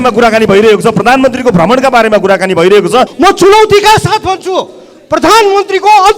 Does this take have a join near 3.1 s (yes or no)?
yes